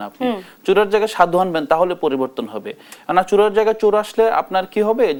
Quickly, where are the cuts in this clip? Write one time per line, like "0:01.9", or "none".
none